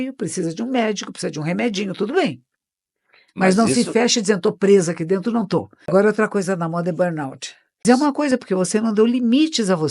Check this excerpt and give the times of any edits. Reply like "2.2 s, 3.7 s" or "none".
5.9 s, 7.8 s